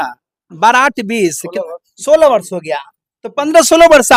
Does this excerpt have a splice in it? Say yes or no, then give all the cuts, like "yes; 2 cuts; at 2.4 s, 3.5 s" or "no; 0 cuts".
no; 0 cuts